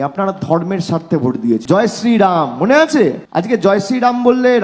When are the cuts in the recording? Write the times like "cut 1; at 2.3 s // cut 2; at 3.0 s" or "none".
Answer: cut 1; at 1.6 s // cut 2; at 3.3 s